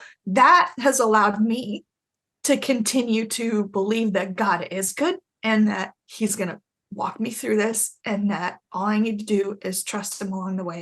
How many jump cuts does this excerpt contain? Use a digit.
1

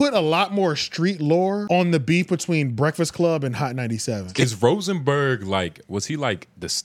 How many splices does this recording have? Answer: 2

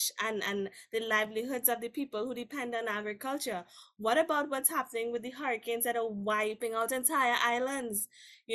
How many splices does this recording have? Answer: 1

